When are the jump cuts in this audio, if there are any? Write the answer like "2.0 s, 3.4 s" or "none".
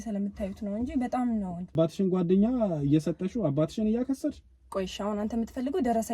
1.7 s